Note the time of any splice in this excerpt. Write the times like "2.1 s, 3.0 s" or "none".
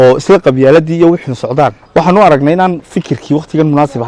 1.8 s